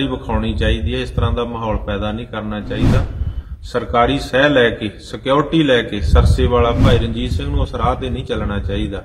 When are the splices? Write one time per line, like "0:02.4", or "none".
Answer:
0:06.8